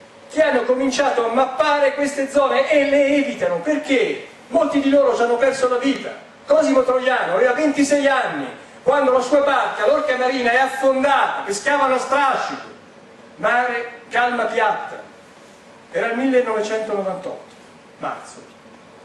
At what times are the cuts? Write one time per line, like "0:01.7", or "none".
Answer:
0:09.3